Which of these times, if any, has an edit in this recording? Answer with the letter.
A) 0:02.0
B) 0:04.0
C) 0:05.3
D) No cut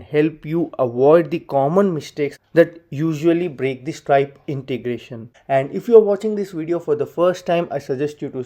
C